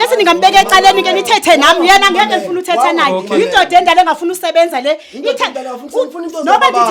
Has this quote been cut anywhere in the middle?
no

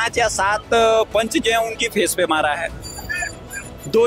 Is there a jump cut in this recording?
no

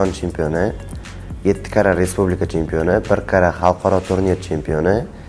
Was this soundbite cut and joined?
no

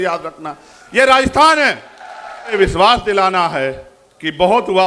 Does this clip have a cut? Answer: yes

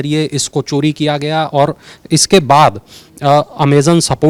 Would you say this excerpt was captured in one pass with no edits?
yes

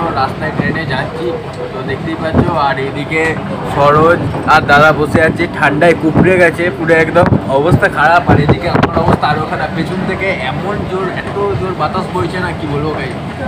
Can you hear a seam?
no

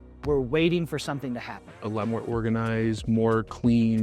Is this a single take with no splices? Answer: no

